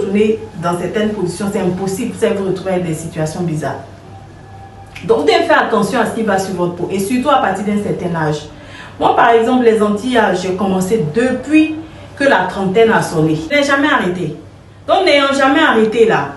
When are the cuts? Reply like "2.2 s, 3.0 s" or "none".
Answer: 13.5 s